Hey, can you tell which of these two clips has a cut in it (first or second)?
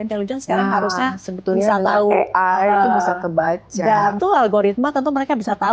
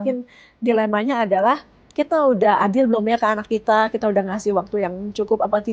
first